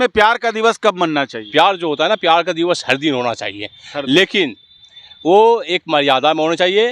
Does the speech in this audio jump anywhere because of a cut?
yes; 1 cut; at 1.4 s

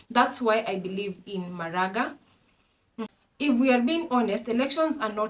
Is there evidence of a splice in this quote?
yes; 1 cut; at 3.0 s

